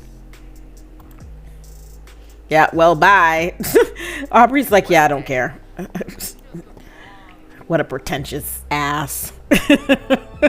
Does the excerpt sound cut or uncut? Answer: cut